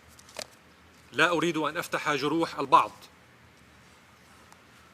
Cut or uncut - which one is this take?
cut